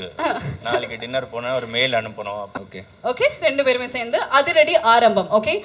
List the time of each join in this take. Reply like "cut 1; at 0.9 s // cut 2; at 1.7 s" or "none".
cut 1; at 2.5 s